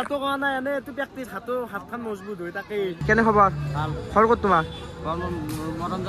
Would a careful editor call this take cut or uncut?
cut